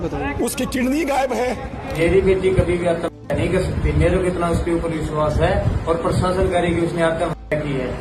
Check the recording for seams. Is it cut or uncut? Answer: cut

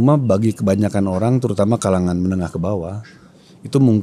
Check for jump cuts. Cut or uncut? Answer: uncut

